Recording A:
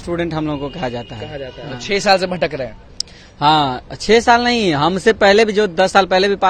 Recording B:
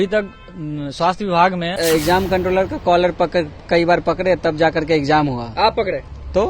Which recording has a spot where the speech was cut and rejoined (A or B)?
B